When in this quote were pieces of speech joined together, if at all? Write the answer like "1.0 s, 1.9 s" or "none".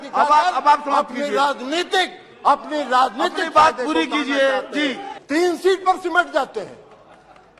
5.1 s